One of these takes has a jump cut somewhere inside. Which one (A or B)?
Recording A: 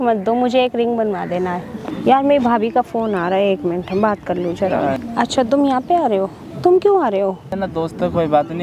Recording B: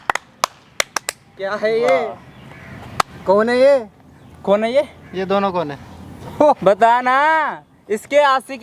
A